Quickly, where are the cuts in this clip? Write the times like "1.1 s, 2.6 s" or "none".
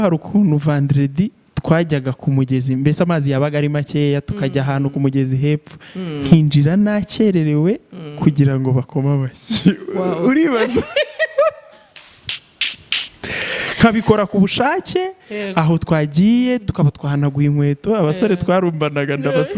none